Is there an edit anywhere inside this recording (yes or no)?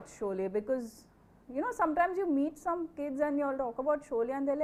no